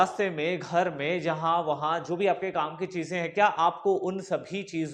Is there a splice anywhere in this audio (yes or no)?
no